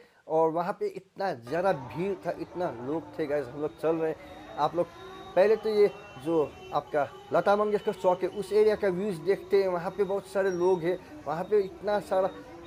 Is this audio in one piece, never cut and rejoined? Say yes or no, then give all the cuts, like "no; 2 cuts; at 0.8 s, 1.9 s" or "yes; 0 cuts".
yes; 0 cuts